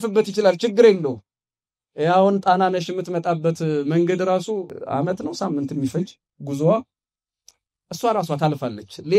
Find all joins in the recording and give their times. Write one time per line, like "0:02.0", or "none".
0:04.8